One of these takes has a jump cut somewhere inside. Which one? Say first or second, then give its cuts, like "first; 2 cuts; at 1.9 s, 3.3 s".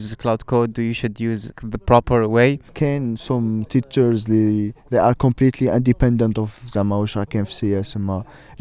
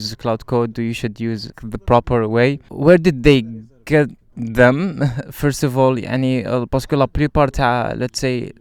first; 1 cut; at 2.7 s